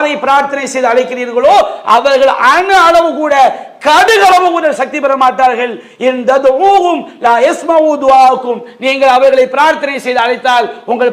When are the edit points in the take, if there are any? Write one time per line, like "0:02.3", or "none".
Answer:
none

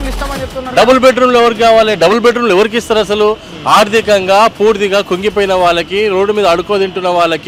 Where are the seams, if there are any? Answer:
none

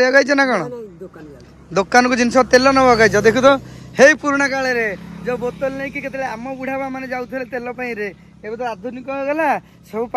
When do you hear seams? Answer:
none

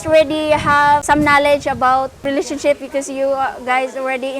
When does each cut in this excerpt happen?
0:01.0
0:02.3

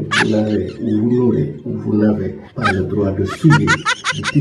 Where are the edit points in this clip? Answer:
none

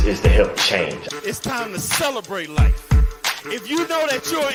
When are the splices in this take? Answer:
none

